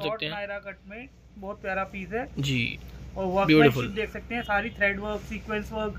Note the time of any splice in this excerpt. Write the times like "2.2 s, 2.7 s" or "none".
none